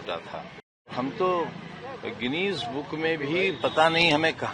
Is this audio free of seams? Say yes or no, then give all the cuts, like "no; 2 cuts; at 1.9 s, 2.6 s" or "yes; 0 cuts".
no; 1 cut; at 0.9 s